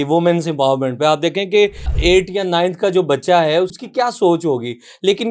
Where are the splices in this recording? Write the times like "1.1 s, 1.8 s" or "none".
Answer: 1.9 s, 3.7 s